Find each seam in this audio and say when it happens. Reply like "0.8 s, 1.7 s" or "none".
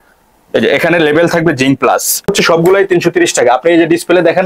2.3 s